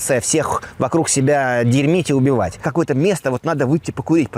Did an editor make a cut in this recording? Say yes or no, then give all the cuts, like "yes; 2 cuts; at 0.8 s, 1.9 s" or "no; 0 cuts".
yes; 1 cut; at 2.6 s